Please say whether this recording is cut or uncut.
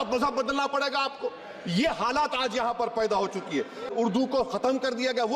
cut